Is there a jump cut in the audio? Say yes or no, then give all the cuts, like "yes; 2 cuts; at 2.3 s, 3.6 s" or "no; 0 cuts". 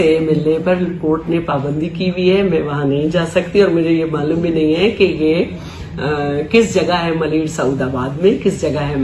no; 0 cuts